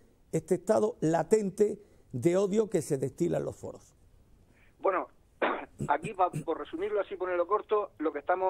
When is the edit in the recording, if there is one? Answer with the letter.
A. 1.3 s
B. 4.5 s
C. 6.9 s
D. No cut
A